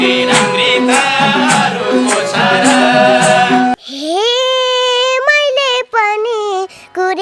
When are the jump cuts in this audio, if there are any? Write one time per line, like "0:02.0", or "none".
0:03.7